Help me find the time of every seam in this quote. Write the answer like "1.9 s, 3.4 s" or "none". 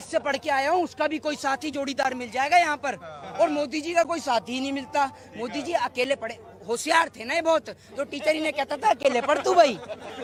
none